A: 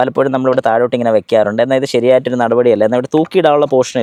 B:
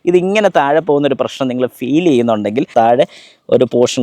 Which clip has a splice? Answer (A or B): B